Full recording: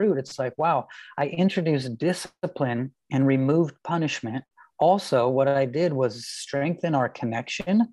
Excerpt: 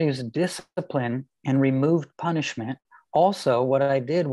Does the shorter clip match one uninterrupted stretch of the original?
yes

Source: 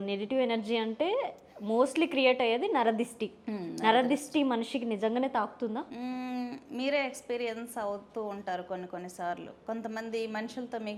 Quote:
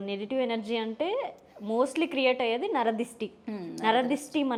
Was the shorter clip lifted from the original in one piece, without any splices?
yes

